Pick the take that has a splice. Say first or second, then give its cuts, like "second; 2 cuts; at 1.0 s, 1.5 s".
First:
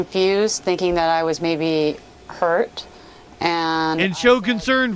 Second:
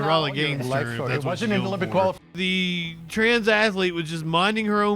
second; 1 cut; at 2.1 s